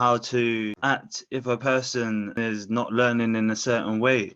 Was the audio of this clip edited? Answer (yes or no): yes